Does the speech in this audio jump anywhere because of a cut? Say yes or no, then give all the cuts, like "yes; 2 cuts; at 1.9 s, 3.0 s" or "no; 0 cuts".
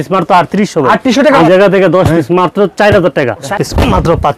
yes; 2 cuts; at 1.4 s, 3.5 s